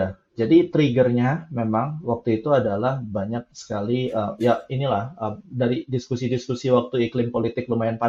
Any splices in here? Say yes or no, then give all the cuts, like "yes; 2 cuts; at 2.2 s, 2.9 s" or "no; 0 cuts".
no; 0 cuts